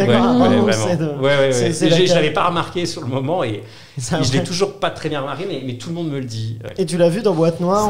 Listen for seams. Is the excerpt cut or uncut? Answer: cut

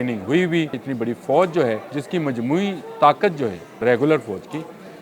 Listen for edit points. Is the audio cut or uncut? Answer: cut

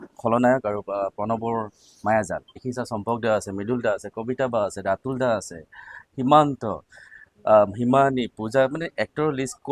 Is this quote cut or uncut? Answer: cut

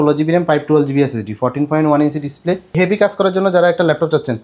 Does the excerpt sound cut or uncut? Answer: cut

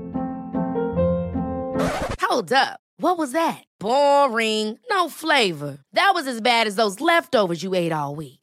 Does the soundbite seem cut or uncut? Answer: uncut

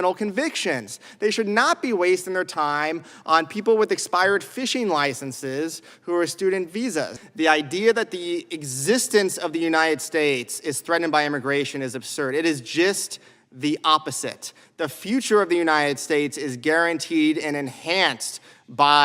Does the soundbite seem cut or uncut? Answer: cut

